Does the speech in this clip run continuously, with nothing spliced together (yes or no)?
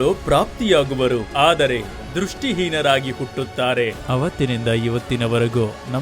no